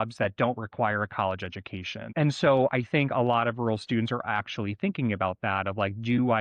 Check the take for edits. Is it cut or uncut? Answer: cut